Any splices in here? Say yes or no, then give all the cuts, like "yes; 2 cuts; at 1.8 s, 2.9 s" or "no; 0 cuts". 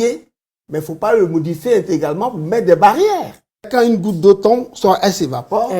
yes; 1 cut; at 3.7 s